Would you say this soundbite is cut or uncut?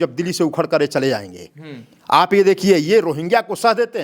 uncut